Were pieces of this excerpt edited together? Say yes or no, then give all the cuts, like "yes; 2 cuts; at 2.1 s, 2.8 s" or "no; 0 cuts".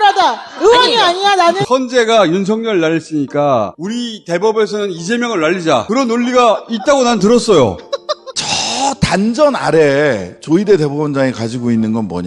yes; 2 cuts; at 1.6 s, 8.2 s